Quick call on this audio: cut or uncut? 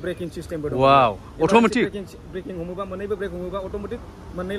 uncut